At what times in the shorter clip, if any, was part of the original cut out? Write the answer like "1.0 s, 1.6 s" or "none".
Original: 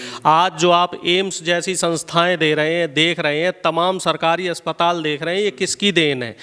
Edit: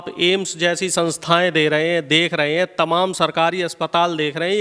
none

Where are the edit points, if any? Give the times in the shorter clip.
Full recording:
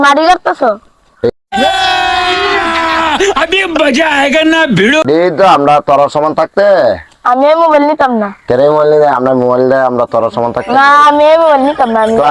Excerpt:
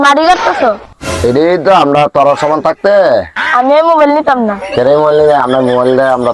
1.3 s

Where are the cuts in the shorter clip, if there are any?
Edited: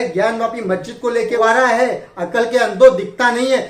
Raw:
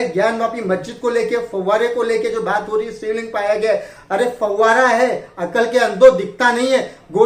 1.4 s

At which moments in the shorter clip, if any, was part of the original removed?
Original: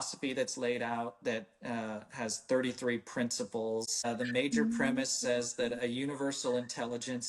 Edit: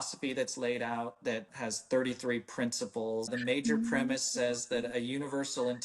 1.5 s, 3.3 s

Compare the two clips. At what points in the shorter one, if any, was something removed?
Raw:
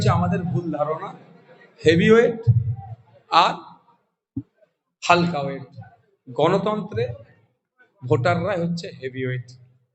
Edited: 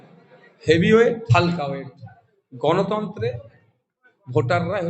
1.2 s

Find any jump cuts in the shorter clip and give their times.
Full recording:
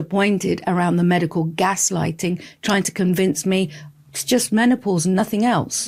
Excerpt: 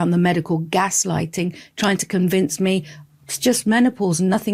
none

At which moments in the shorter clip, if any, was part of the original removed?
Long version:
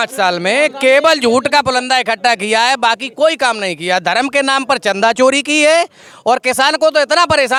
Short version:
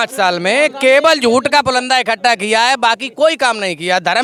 none

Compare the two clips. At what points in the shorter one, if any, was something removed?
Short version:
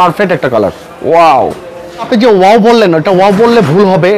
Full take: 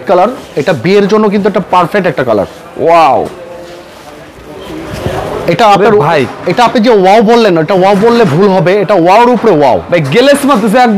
2.1 s

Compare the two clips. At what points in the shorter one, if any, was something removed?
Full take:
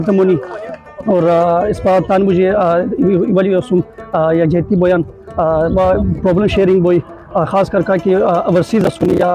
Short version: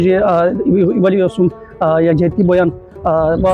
none

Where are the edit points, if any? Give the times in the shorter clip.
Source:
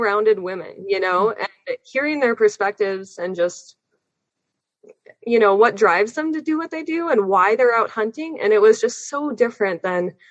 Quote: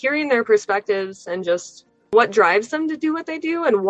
2.1 s

